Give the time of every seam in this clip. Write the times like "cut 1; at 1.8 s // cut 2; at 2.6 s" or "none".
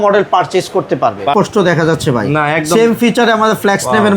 cut 1; at 1.3 s